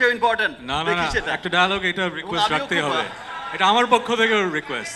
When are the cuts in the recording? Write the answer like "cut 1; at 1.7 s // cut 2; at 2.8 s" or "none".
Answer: none